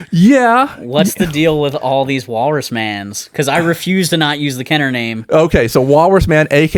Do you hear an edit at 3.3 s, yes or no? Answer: no